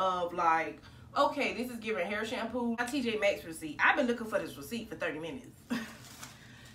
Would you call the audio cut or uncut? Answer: cut